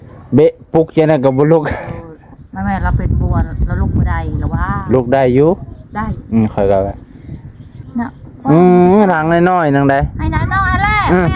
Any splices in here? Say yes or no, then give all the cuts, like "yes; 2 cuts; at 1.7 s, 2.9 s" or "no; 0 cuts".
yes; 1 cut; at 7.7 s